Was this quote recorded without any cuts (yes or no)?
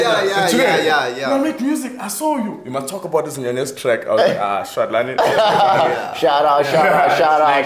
yes